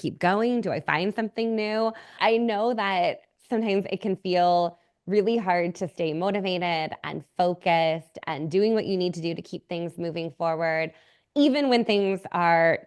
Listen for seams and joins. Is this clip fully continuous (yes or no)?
no